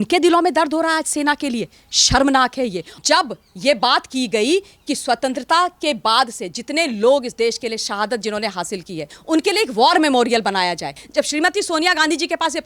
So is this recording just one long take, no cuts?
no; 3 cuts; at 2.9 s, 9.1 s, 10.9 s

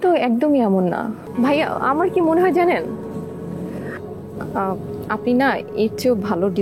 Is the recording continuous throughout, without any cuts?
no; 1 cut; at 1.3 s

